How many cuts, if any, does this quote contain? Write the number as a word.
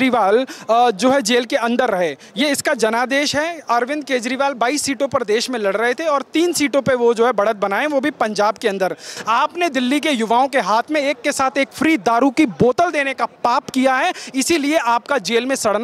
one